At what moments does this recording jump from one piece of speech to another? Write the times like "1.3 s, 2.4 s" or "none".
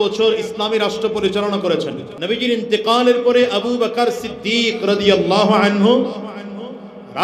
2.1 s